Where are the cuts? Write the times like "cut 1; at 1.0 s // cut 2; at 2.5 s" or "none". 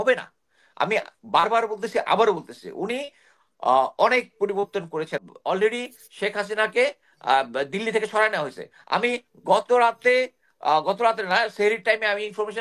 cut 1; at 5.2 s